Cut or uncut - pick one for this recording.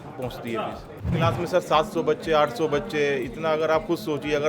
cut